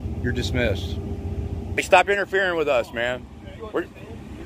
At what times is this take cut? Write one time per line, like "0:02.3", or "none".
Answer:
0:01.8